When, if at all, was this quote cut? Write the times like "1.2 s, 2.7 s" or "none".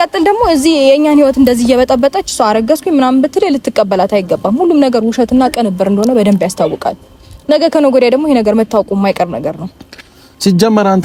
none